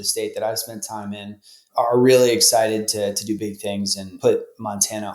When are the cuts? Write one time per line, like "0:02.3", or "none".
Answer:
0:04.1